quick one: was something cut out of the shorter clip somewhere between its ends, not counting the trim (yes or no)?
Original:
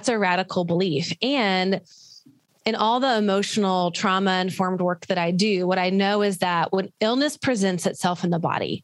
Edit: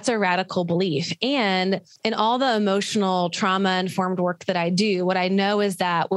yes